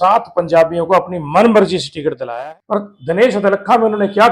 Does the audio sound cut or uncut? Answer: cut